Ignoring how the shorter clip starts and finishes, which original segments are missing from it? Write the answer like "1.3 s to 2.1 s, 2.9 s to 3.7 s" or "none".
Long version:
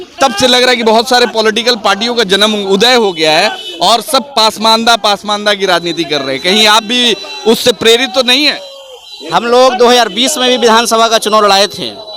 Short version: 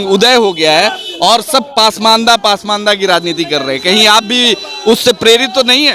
none

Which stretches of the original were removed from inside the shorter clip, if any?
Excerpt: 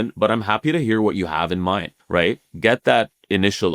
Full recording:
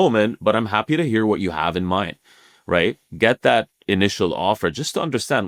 2.2 s to 2.5 s

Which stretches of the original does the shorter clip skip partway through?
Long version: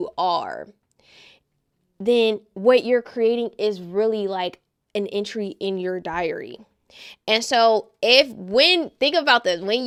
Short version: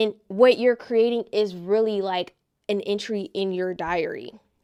none

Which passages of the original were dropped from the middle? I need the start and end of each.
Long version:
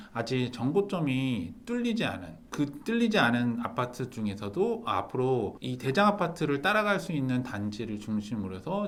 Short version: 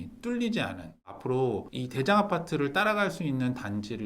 2.6 s to 5.0 s

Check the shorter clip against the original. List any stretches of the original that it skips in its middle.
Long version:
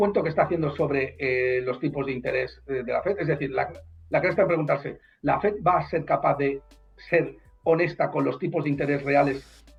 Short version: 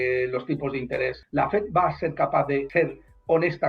2.5 s to 5.1 s, 6.6 s to 7.0 s

